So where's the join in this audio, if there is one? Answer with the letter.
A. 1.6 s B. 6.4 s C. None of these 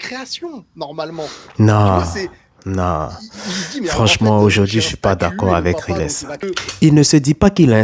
B